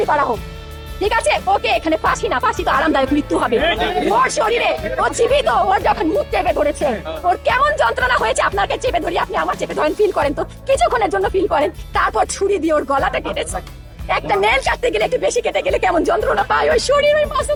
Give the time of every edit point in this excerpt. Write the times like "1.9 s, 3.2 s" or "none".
none